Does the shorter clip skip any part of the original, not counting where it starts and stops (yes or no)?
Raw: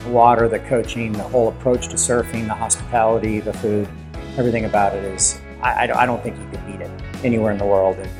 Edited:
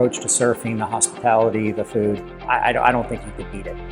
yes